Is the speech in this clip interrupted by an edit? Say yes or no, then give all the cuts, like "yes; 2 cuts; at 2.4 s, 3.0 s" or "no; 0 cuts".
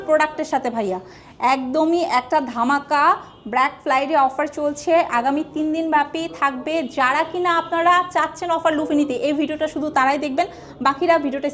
no; 0 cuts